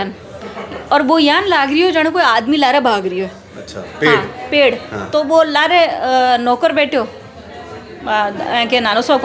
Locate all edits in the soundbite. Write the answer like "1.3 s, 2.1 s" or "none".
none